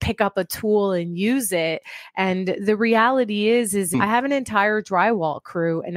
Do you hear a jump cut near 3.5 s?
yes; 1 cut; at 3.5 s

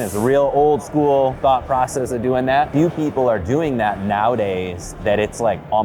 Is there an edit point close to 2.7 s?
yes; 1 cut; at 2.7 s

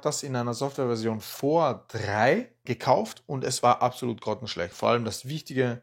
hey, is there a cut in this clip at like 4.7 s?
yes; 1 cut; at 4.7 s

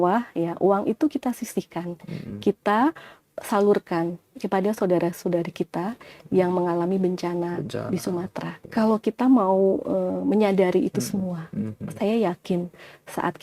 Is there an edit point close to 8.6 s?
yes; 1 cut; at 8.6 s

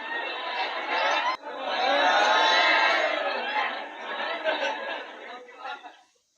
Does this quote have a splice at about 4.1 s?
no; 1 cut; at 1.3 s

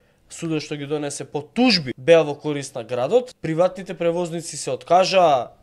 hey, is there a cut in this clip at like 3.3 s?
yes; 2 cuts; at 1.9 s, 3.3 s

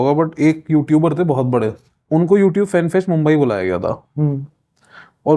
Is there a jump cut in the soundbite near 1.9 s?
yes; 1 cut; at 1.9 s

